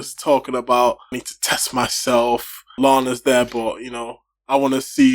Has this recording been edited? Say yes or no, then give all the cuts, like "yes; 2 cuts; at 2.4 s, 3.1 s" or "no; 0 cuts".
yes; 2 cuts; at 1.3 s, 2.7 s